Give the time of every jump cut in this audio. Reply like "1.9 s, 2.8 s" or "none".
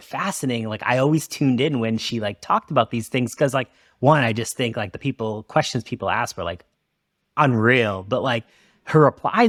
none